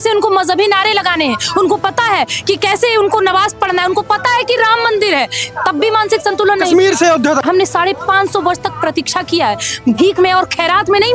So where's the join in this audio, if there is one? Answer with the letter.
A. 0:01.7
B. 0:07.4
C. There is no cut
B